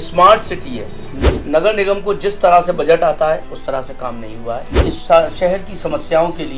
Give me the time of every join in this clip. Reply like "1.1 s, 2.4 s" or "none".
1.2 s, 4.8 s